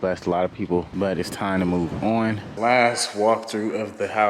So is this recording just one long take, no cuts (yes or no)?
no